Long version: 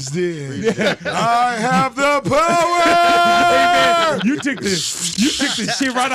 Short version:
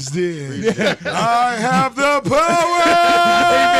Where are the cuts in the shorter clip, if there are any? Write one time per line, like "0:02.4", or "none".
none